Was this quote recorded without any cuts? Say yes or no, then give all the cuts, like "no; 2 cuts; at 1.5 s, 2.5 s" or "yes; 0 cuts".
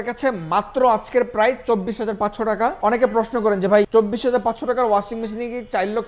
no; 2 cuts; at 2.8 s, 3.9 s